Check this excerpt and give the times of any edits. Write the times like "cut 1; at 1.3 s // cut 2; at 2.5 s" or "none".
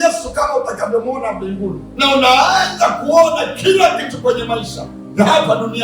cut 1; at 1.8 s